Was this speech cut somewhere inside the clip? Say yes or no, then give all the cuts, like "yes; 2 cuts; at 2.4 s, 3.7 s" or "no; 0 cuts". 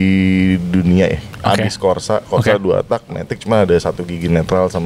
no; 0 cuts